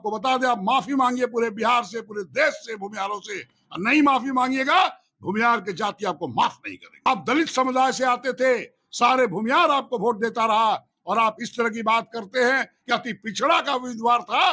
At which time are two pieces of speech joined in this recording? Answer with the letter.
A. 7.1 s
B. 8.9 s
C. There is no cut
A